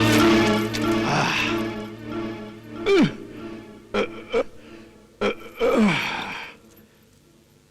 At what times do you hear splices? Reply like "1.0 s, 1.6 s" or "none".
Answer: none